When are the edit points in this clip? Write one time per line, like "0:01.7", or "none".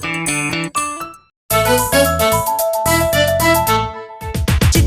0:01.4